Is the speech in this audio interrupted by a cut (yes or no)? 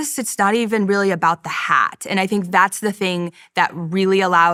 no